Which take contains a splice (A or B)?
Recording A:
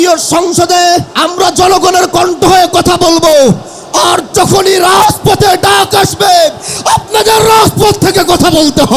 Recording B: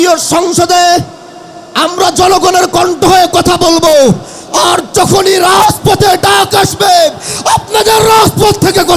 A